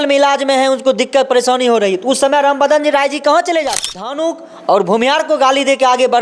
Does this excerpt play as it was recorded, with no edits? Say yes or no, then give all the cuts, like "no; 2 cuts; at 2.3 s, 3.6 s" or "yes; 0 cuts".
no; 1 cut; at 4.1 s